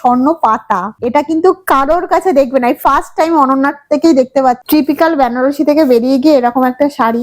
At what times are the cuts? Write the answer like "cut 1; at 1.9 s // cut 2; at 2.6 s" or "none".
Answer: cut 1; at 1.0 s // cut 2; at 4.6 s